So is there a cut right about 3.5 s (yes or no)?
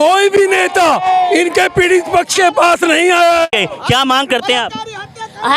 yes